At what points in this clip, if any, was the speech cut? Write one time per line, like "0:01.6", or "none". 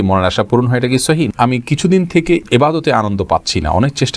0:01.3